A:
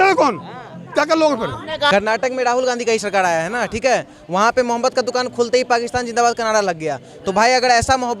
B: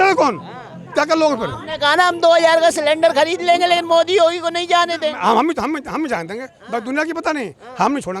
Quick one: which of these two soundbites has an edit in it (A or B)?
A